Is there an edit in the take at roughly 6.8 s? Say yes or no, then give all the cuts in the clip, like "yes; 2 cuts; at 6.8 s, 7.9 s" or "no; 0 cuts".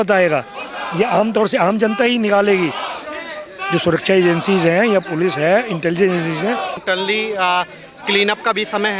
yes; 1 cut; at 6.8 s